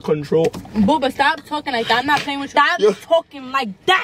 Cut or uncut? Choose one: cut